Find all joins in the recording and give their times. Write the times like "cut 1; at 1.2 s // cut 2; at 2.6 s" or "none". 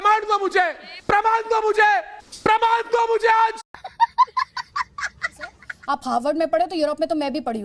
cut 1; at 5.7 s